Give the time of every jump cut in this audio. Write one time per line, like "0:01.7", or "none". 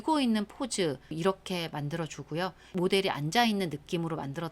0:01.1